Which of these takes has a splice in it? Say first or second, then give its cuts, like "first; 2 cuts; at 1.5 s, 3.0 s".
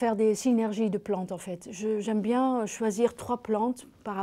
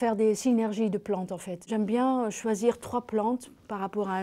second; 1 cut; at 1.7 s